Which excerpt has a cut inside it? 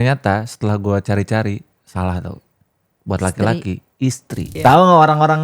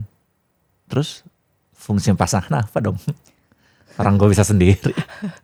first; 1 cut; at 4.5 s

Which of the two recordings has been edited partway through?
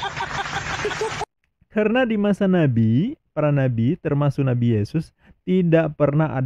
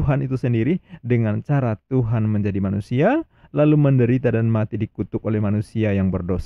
first; 1 cut; at 1.2 s

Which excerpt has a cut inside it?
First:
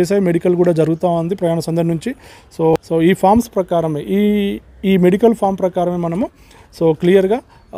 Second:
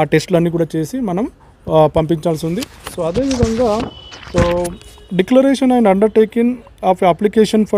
first; 1 cut; at 2.7 s

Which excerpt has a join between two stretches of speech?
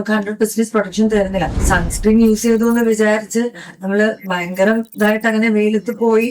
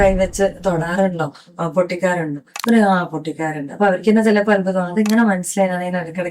first; 1 cut; at 1.6 s

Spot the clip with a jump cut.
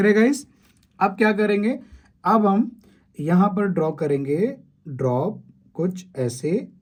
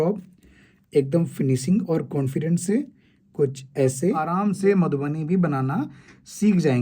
second; 1 cut; at 4.3 s

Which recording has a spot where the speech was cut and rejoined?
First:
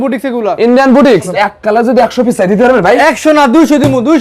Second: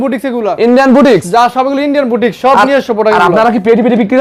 first; 1 cut; at 1.3 s

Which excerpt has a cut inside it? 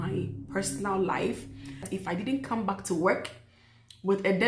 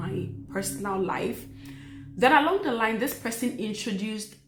first; 1 cut; at 1.9 s

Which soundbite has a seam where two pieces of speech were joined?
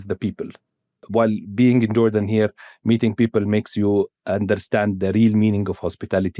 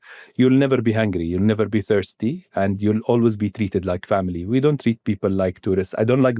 first; 1 cut; at 1.0 s

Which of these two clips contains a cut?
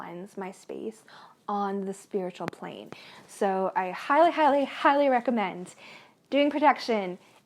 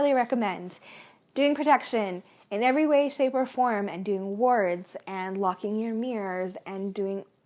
first; 1 cut; at 3.1 s

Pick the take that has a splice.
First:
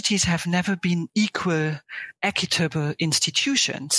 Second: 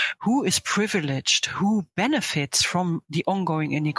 first; 1 cut; at 1.1 s

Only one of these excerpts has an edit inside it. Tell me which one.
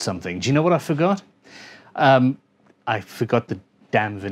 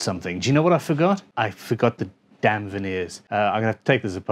second; 2 cuts; at 1.3 s, 3.2 s

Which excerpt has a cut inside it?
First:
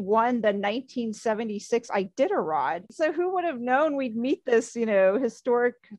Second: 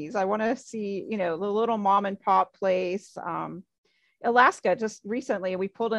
first; 1 cut; at 2.9 s

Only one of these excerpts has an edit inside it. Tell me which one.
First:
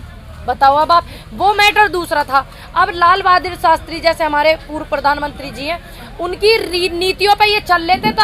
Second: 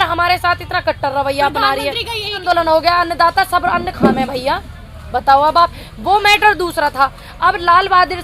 second; 1 cut; at 2.4 s

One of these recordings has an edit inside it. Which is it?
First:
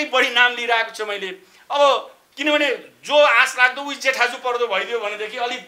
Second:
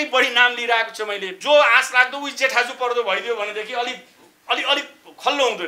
second; 1 cut; at 1.3 s

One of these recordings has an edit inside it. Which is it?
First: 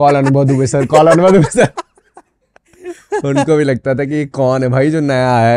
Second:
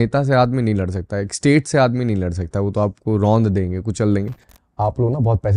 second; 1 cut; at 4.6 s

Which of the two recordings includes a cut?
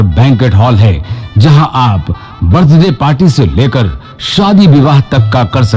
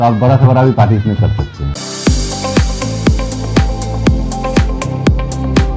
second; 1 cut; at 1.7 s

